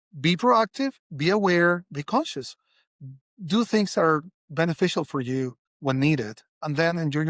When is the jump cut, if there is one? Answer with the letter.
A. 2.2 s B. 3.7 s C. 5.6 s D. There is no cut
C